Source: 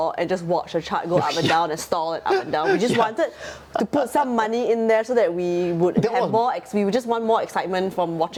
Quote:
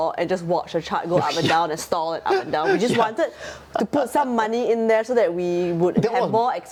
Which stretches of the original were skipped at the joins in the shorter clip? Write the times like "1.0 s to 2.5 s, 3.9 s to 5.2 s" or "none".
none